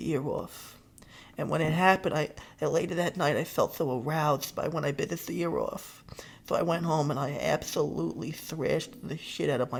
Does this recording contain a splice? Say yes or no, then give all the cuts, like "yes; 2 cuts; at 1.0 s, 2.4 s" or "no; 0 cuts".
no; 0 cuts